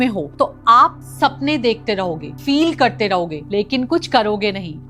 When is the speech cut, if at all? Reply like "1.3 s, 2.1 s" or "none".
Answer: none